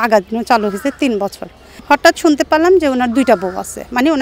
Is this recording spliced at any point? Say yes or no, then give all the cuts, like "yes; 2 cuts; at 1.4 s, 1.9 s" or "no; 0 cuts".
yes; 1 cut; at 1.8 s